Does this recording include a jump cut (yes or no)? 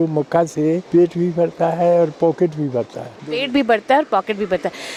no